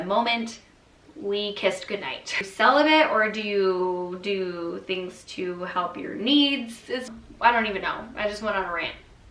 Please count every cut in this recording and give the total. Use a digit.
2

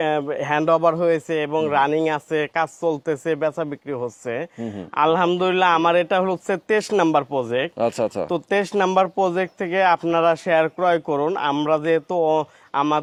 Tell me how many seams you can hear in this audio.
0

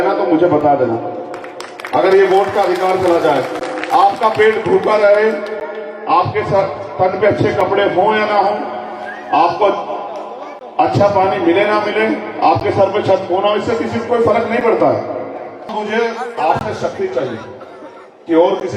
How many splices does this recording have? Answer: 1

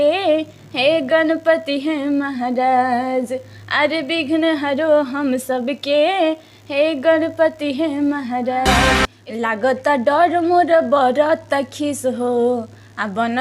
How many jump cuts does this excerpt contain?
1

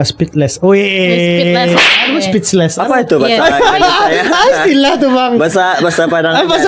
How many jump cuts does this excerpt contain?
0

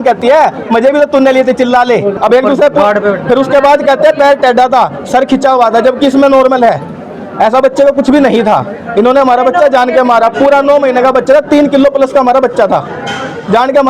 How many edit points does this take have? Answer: 1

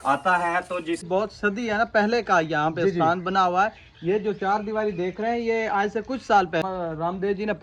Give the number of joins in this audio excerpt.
2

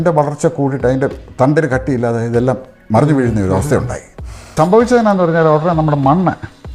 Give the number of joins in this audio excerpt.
1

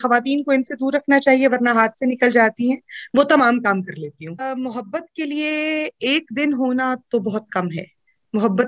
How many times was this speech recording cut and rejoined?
1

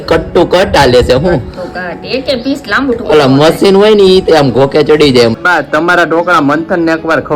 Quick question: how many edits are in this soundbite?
1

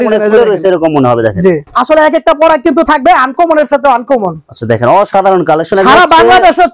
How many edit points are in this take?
1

